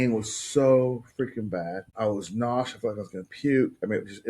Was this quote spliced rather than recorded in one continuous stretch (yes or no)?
yes